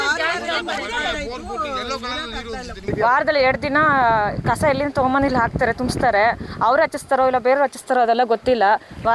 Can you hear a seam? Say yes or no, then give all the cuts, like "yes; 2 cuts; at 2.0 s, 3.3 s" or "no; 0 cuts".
no; 0 cuts